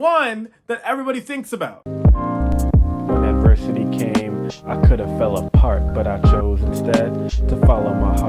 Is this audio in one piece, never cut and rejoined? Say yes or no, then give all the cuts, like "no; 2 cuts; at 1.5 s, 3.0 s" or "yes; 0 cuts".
no; 1 cut; at 1.8 s